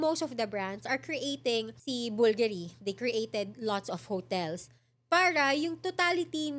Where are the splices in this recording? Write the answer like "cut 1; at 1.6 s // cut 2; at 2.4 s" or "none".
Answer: cut 1; at 1.8 s